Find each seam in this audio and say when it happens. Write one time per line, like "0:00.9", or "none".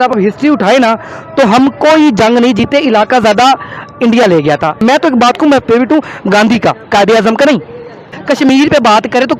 0:04.8
0:08.2